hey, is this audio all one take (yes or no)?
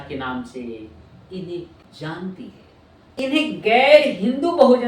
no